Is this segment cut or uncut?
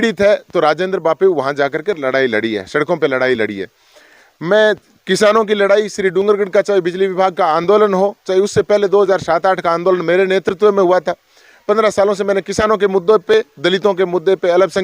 uncut